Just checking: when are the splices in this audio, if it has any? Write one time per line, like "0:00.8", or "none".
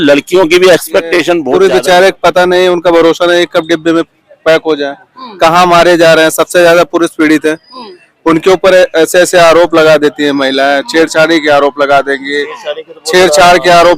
0:01.5